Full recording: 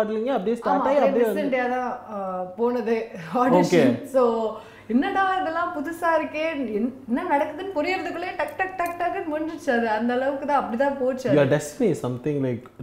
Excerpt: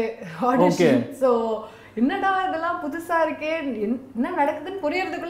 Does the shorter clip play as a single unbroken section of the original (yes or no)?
yes